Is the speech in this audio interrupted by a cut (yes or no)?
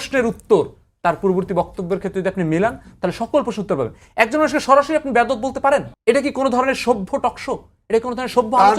yes